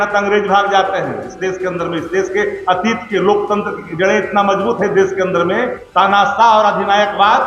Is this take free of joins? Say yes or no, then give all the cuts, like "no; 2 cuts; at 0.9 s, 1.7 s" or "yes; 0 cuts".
yes; 0 cuts